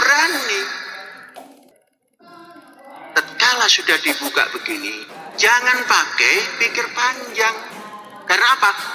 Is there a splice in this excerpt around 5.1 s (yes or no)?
no